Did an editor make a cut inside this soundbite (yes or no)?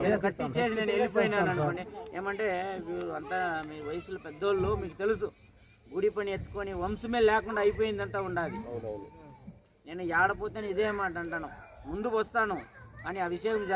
no